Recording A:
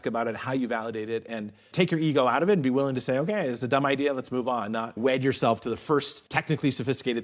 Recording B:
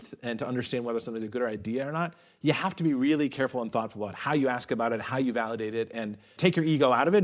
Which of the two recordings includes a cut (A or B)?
A